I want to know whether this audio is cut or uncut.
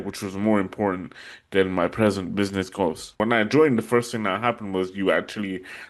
cut